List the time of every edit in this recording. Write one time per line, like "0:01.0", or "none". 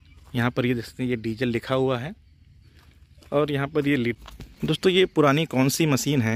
0:04.2